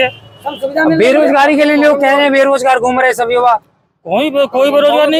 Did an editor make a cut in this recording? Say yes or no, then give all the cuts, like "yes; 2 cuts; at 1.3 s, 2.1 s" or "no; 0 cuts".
no; 0 cuts